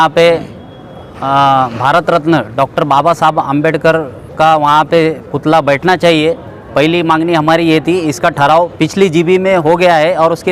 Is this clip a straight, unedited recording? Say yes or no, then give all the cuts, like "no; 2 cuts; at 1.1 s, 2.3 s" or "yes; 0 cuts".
yes; 0 cuts